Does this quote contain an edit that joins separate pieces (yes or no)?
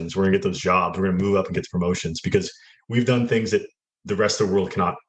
no